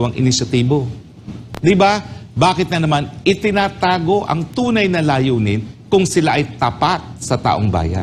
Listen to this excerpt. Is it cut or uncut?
uncut